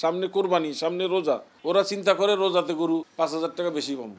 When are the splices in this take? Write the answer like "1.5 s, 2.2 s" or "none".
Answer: 1.5 s, 3.1 s